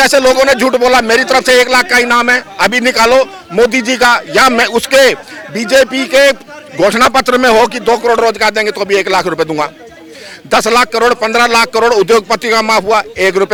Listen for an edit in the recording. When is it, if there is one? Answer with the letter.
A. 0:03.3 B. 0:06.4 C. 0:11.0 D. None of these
D